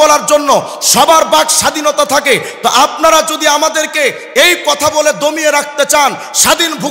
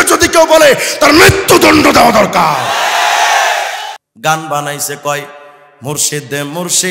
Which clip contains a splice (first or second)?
second